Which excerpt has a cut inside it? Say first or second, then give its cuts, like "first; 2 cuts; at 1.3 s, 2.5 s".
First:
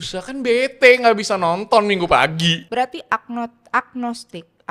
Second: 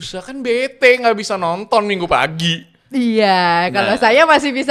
first; 1 cut; at 2.6 s